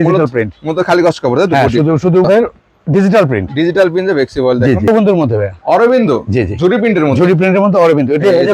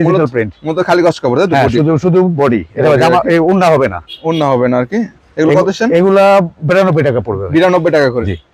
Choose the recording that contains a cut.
first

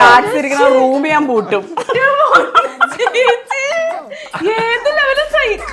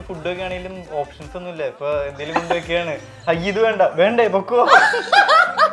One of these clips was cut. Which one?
first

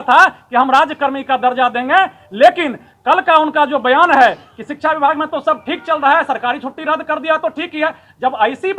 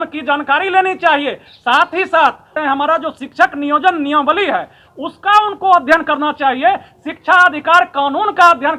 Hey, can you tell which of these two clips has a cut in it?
second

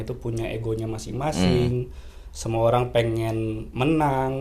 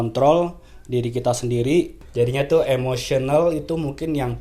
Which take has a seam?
second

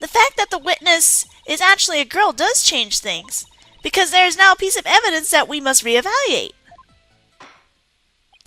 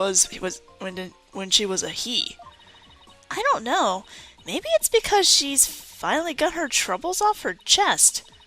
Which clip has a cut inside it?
second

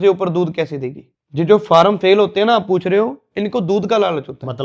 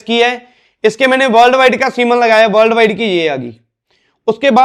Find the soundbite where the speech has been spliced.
first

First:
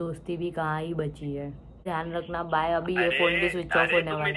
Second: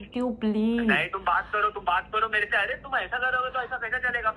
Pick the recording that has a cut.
first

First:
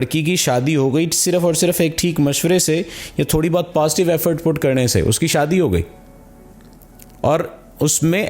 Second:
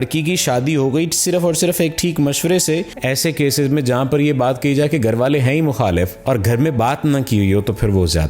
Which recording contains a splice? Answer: second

